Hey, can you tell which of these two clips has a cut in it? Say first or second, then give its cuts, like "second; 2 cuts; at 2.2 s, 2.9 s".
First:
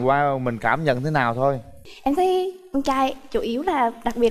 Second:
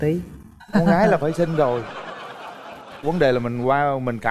first; 1 cut; at 1.8 s